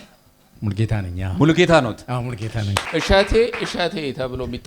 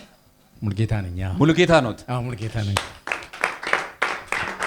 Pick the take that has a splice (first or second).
first